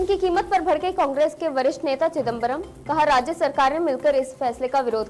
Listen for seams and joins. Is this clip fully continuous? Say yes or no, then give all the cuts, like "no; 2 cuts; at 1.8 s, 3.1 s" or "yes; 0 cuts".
yes; 0 cuts